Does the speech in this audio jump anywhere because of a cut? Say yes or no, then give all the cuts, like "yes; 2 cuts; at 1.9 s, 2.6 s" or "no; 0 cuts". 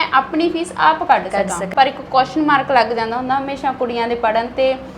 yes; 1 cut; at 1.7 s